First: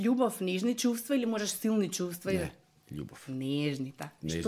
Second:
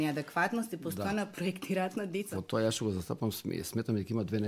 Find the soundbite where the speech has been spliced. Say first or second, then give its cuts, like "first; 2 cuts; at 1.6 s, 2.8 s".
second; 1 cut; at 2.2 s